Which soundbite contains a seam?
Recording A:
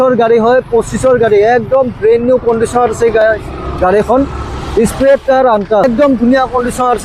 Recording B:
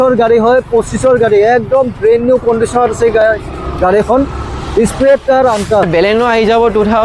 B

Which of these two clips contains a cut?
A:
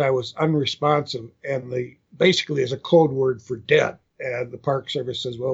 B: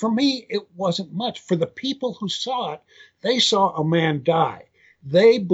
A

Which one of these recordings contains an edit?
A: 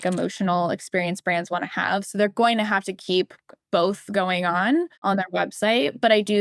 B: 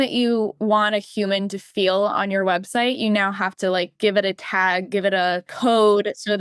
B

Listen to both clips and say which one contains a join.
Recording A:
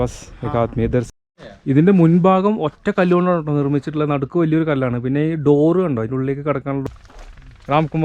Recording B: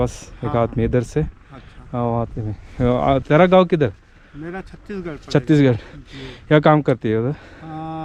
A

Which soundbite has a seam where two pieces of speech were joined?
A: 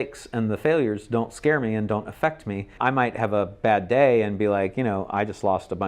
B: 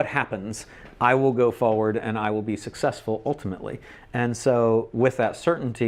A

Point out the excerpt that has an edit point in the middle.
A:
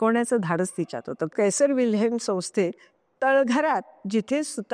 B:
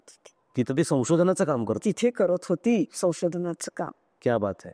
A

